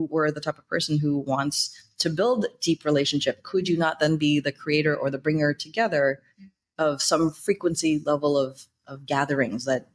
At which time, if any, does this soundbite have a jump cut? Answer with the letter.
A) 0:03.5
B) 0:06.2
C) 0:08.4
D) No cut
D